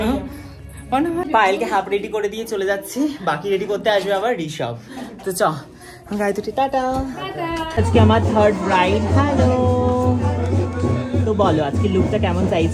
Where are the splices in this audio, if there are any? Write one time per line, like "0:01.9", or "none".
0:01.3
0:07.9